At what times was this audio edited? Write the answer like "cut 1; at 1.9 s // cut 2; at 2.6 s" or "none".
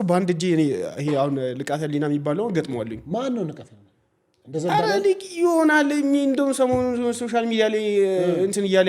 none